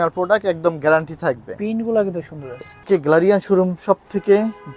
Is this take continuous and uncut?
no; 1 cut; at 2.8 s

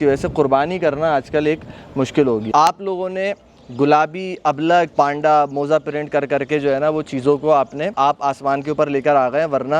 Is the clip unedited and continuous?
no; 3 cuts; at 2.5 s, 4.9 s, 7.9 s

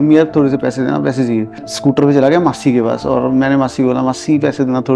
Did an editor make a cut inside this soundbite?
yes; 1 cut; at 1.7 s

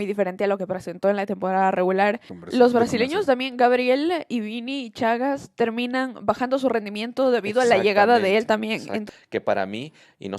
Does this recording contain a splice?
yes; 2 cuts; at 2.3 s, 9.0 s

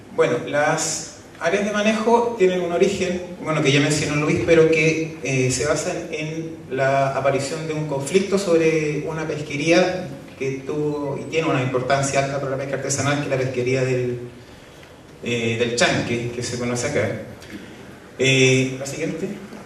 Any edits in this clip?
no; 0 cuts

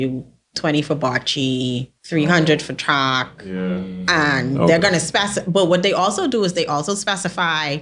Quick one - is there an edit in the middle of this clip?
yes; 1 cut; at 1.9 s

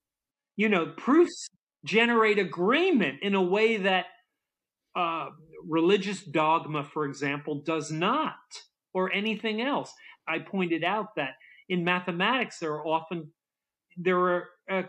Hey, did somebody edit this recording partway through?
yes; 1 cut; at 10.1 s

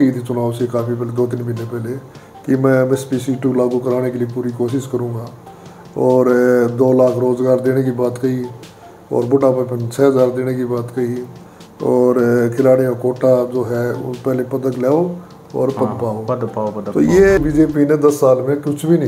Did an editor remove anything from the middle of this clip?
yes; 1 cut; at 17.4 s

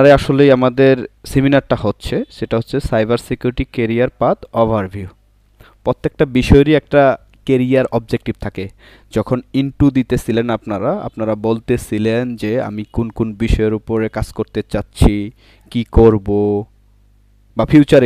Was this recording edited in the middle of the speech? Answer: yes; 1 cut; at 1.2 s

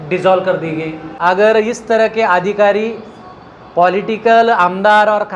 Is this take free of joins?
no; 1 cut; at 1.1 s

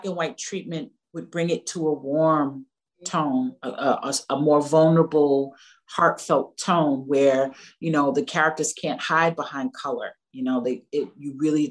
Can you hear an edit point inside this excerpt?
no; 0 cuts

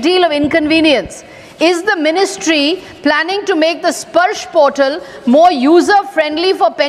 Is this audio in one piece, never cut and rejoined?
yes; 0 cuts

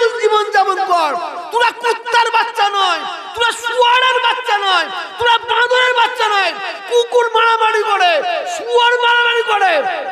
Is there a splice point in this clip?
no; 0 cuts

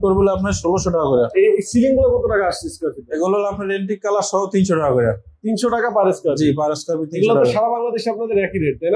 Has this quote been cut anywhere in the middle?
yes; 1 cut; at 1.3 s

